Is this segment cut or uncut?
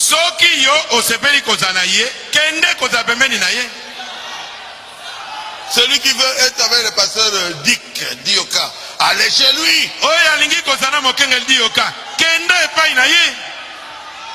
uncut